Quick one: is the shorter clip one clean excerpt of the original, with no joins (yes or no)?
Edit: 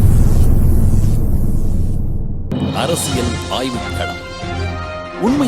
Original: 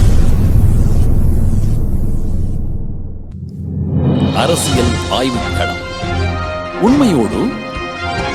no